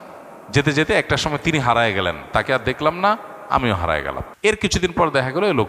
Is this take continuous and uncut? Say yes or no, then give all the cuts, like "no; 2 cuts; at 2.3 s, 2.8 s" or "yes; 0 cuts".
no; 1 cut; at 4.3 s